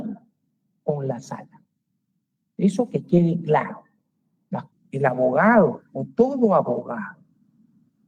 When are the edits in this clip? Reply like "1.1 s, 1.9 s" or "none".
4.7 s